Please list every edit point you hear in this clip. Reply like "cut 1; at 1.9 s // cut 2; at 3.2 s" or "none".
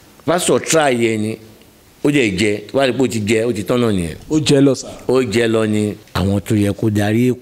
cut 1; at 6.0 s